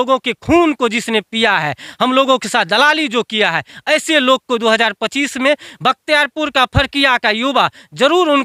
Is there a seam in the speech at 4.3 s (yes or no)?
no